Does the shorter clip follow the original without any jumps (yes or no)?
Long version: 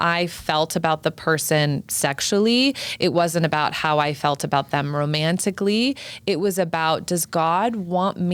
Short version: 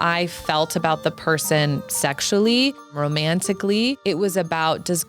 no